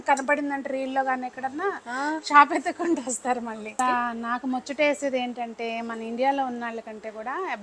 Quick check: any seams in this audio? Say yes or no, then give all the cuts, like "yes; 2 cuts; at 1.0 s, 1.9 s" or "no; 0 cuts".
yes; 1 cut; at 3.8 s